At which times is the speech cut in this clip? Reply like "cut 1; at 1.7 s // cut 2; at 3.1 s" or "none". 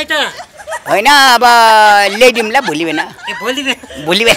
none